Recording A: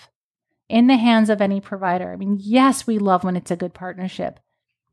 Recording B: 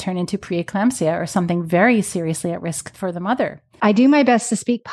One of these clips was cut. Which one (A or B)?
B